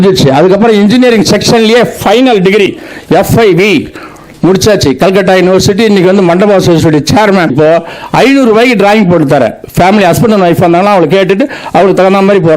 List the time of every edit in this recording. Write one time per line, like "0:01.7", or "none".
0:07.5